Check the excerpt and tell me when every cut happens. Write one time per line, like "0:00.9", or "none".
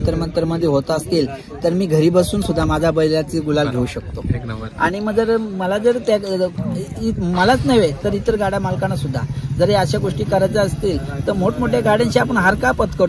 none